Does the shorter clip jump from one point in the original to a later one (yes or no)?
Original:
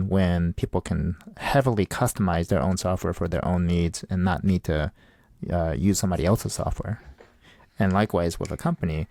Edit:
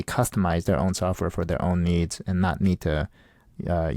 no